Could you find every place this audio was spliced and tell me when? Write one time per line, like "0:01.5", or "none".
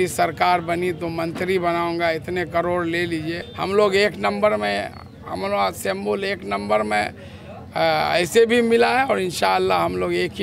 0:03.4